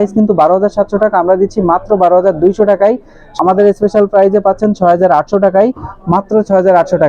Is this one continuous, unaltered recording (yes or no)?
no